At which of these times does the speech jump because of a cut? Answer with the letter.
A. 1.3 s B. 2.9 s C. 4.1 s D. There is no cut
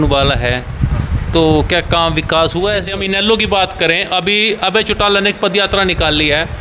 B